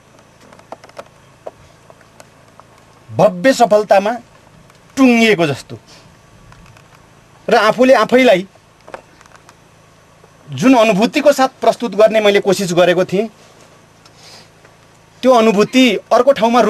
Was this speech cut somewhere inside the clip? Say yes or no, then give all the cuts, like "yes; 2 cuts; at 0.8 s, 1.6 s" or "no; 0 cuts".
no; 0 cuts